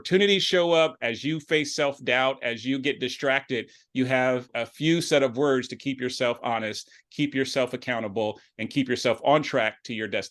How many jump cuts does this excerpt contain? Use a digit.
1